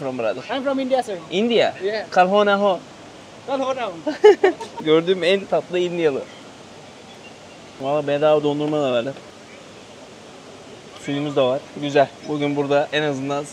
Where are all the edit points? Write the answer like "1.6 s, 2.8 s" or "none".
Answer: none